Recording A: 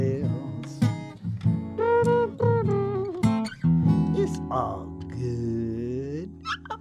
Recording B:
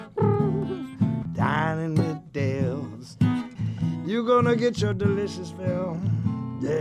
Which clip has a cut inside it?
B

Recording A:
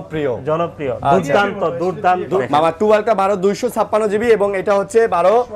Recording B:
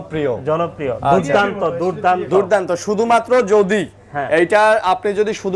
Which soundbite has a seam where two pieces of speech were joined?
A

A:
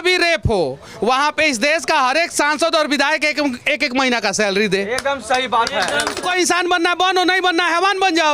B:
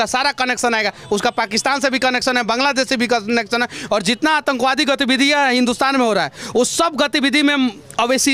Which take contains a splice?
A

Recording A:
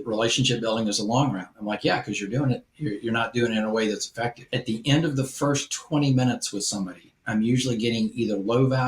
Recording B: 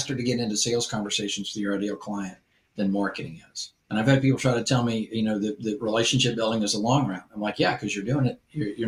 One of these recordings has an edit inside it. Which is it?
A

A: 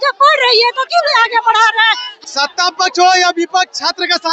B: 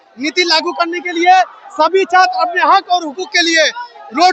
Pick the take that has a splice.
A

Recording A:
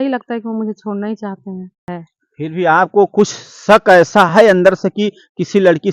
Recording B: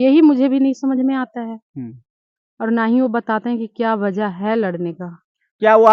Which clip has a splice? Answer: A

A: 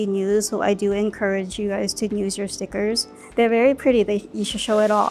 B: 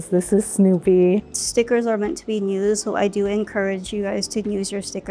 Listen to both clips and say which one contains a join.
B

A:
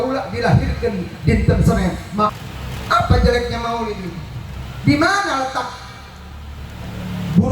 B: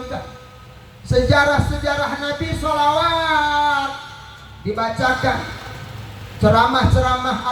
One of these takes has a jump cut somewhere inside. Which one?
A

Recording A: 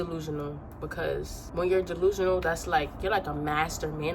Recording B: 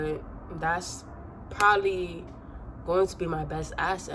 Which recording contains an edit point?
A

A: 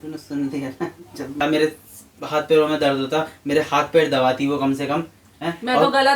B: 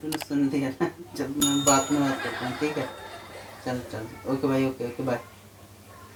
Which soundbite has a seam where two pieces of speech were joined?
A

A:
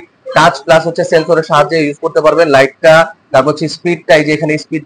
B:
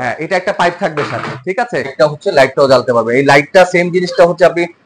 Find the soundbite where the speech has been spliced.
B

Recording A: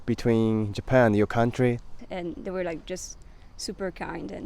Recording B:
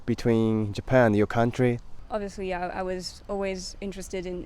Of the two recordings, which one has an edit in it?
A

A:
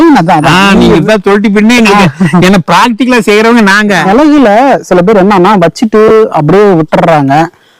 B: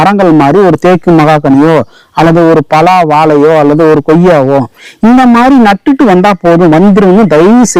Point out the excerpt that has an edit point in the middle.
A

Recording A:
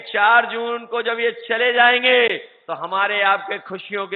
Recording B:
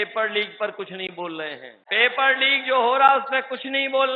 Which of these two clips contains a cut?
B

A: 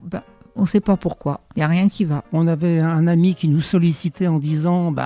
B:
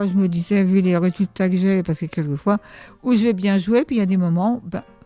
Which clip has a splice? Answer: A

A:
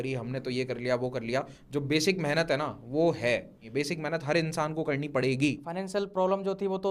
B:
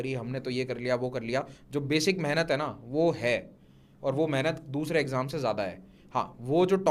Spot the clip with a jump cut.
A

